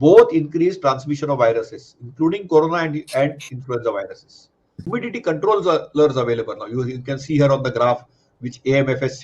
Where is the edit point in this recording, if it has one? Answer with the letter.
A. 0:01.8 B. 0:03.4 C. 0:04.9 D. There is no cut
C